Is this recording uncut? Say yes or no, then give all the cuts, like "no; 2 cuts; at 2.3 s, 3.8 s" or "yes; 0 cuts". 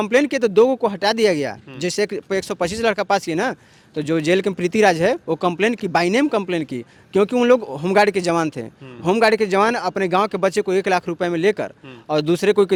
yes; 0 cuts